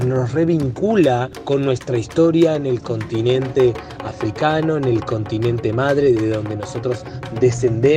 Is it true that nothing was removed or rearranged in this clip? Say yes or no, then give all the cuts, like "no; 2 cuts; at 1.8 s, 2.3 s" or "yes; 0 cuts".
yes; 0 cuts